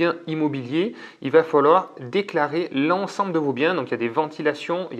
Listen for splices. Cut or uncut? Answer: uncut